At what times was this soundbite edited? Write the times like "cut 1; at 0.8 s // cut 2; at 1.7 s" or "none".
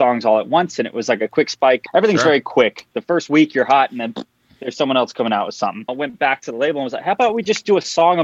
cut 1; at 1.8 s // cut 2; at 2.9 s // cut 3; at 5.9 s

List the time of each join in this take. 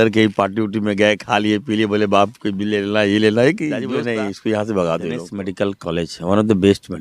cut 1; at 3.9 s // cut 2; at 5.4 s

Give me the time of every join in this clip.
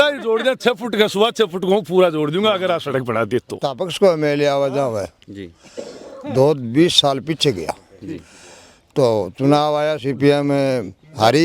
cut 1; at 3.7 s

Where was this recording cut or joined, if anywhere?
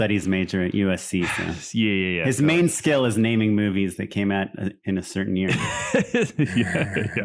none

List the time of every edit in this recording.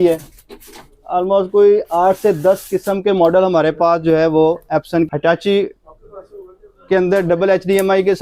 cut 1; at 5.1 s

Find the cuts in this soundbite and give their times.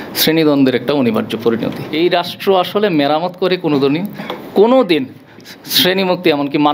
cut 1; at 1.8 s

